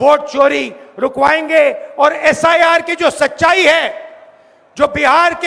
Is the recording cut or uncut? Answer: uncut